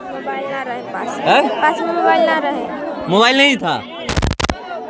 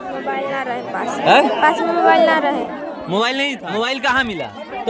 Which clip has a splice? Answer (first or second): second